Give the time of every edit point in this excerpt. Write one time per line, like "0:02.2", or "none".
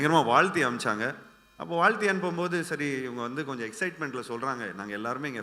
none